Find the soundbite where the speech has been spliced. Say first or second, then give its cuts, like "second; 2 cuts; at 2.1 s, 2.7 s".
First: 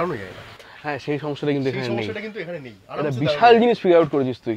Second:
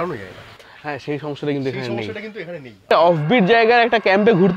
second; 1 cut; at 2.8 s